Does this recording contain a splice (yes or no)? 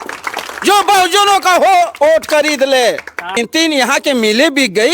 yes